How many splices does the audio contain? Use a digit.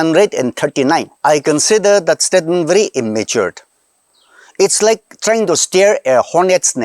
1